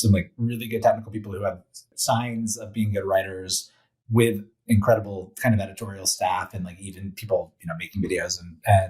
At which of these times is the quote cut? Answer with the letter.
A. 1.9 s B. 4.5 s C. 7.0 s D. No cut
A